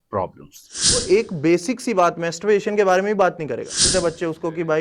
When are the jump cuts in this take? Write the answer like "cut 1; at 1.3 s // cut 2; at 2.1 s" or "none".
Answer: cut 1; at 1.0 s // cut 2; at 3.9 s